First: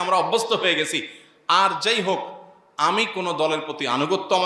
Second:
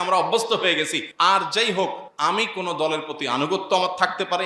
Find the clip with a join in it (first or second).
second